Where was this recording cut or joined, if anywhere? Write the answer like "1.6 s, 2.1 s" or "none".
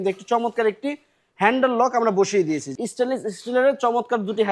2.7 s